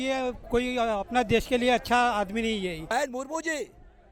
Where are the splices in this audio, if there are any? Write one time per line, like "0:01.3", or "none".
0:02.9